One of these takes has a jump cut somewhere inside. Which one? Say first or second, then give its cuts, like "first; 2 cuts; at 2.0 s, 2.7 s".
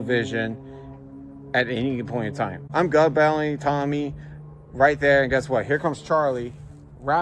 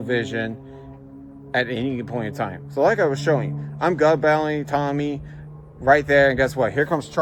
first; 1 cut; at 2.6 s